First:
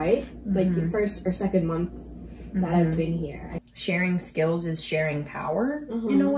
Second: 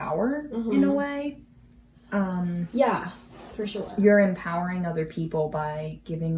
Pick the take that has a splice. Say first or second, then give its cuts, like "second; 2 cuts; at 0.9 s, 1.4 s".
first; 1 cut; at 3.5 s